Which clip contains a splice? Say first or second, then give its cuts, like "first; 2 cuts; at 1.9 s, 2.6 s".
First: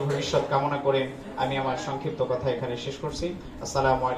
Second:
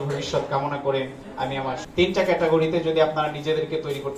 second; 1 cut; at 1.8 s